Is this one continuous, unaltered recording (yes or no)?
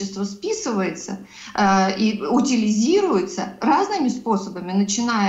yes